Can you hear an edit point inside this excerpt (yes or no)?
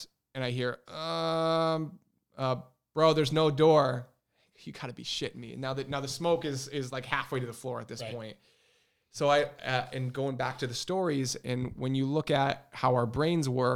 no